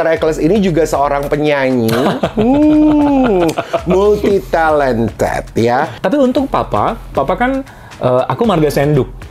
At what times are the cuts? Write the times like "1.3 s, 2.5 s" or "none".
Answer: 5.9 s

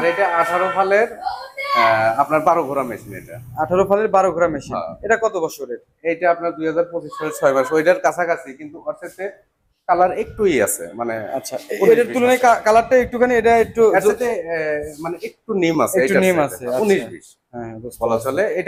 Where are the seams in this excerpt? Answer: none

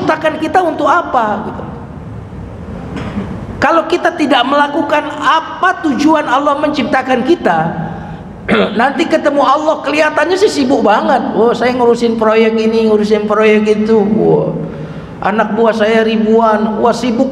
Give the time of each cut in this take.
none

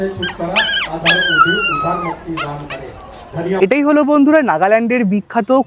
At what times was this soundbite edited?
none

